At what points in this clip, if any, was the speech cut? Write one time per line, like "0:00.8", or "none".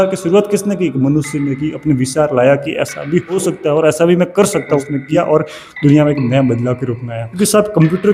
0:03.4
0:05.0
0:07.3

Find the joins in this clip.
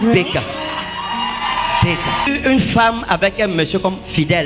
0:02.3

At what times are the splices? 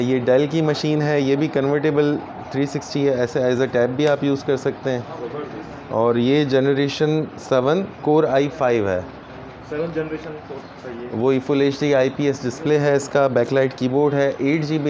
none

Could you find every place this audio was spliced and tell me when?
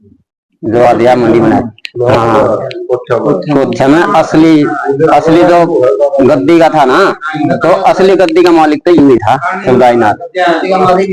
none

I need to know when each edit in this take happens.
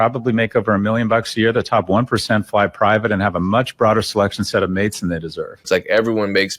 0:05.6

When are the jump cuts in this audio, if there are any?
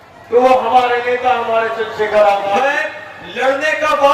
0:02.6

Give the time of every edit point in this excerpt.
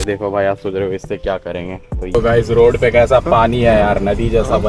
0:02.1

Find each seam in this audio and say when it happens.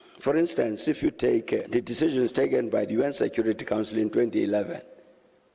0:01.6

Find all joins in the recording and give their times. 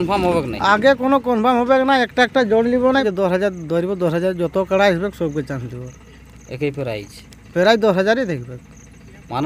0:03.1

